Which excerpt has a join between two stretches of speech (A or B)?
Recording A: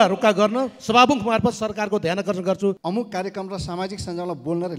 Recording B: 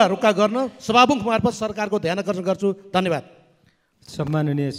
A